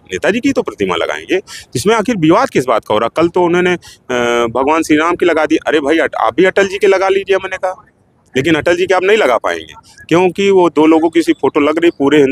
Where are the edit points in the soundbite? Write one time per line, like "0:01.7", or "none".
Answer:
none